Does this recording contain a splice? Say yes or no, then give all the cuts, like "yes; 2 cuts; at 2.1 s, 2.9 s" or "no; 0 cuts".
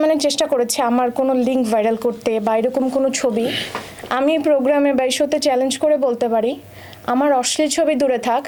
no; 0 cuts